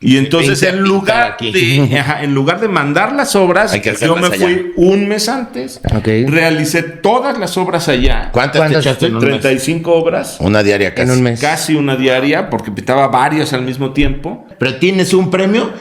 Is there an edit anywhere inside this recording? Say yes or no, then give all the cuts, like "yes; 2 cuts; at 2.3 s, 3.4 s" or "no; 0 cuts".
yes; 1 cut; at 14.5 s